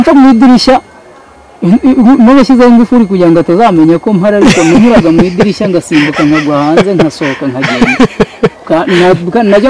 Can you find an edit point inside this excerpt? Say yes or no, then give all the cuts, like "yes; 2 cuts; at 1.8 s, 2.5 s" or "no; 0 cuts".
no; 0 cuts